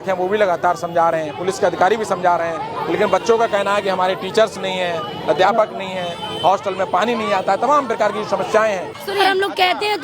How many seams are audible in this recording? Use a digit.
1